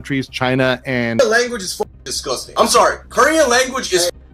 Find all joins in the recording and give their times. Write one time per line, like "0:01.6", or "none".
0:01.2